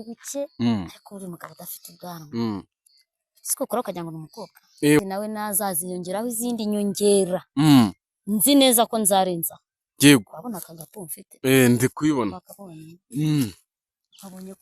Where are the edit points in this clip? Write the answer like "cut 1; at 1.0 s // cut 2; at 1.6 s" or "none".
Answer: cut 1; at 5.0 s